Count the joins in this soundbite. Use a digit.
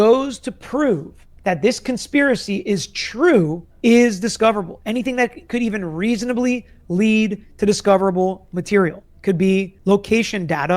0